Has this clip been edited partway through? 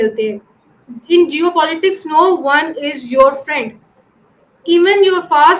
no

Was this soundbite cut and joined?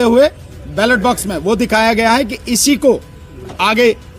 no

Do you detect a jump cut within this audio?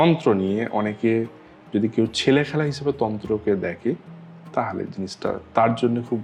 no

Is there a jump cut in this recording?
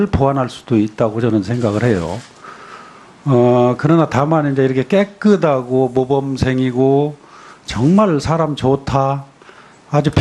no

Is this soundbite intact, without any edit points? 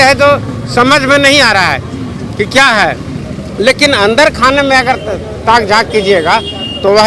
yes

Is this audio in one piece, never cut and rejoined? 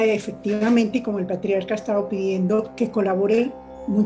no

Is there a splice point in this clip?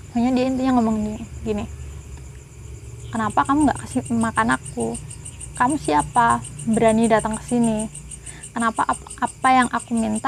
no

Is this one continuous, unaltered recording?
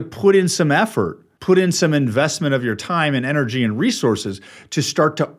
no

